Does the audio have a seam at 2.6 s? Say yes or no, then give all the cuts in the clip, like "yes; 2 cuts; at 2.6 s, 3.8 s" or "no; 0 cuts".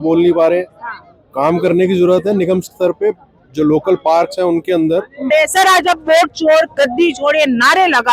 no; 1 cut; at 5.3 s